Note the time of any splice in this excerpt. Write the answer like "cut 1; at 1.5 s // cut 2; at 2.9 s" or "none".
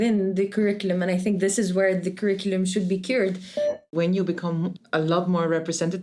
cut 1; at 3.9 s // cut 2; at 4.8 s